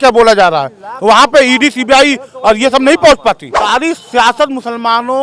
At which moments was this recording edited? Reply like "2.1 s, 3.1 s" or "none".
3.4 s